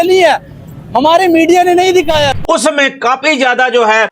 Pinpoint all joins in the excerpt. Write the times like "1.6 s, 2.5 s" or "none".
2.4 s